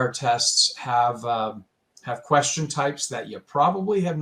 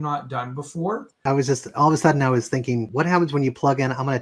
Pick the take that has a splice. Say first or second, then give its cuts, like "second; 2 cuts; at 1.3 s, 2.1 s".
second; 2 cuts; at 1.2 s, 2.9 s